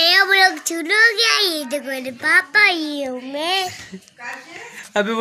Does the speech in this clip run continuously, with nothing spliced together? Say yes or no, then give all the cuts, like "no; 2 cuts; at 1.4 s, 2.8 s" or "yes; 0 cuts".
yes; 0 cuts